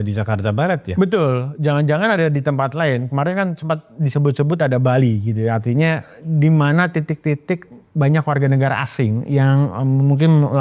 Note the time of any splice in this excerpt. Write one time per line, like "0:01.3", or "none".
none